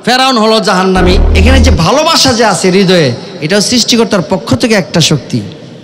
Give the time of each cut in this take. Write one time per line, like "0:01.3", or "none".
0:01.3